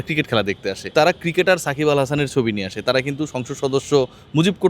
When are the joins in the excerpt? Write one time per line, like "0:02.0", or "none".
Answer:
0:00.9